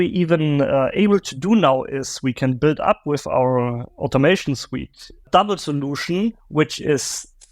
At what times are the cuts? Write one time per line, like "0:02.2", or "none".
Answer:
0:05.2